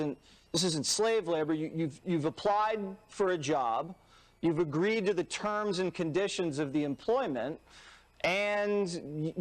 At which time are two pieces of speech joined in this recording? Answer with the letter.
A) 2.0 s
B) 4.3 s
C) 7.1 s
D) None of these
C